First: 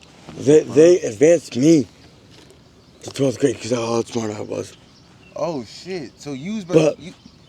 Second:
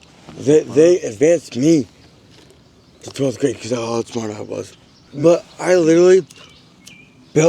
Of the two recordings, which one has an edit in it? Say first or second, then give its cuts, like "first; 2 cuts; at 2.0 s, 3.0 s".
second; 1 cut; at 5.1 s